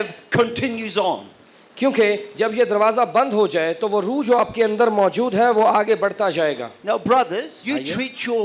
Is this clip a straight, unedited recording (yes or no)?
no